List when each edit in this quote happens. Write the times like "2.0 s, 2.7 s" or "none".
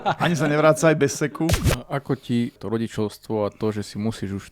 1.7 s, 2.6 s